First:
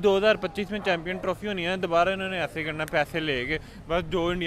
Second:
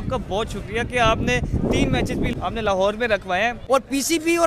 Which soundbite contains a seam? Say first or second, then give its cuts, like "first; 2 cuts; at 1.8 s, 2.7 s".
second; 2 cuts; at 2.3 s, 3.6 s